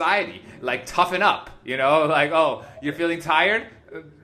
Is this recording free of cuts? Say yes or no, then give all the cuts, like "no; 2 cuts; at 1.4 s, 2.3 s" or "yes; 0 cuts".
yes; 0 cuts